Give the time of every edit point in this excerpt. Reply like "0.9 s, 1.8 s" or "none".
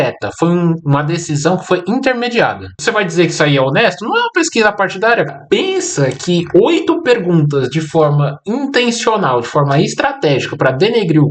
2.7 s, 5.3 s